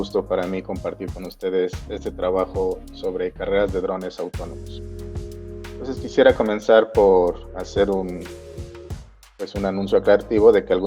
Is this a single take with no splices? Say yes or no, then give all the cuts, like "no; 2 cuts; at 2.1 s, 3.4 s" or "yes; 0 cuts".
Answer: no; 2 cuts; at 4.5 s, 5.8 s